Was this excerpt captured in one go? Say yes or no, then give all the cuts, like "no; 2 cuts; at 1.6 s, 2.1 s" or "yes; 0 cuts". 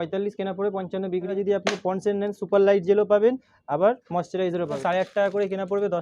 no; 2 cuts; at 1.3 s, 4.8 s